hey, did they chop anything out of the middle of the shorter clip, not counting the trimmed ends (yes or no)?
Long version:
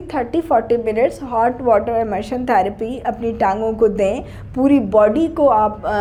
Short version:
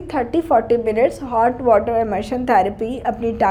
no